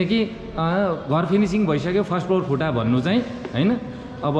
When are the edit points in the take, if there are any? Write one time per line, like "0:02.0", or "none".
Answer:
none